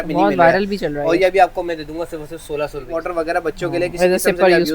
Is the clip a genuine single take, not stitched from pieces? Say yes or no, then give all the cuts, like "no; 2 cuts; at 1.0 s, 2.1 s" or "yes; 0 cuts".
no; 1 cut; at 2.9 s